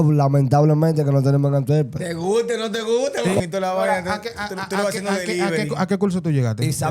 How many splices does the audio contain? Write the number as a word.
one